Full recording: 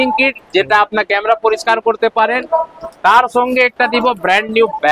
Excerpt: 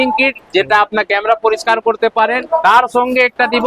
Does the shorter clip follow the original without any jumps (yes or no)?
no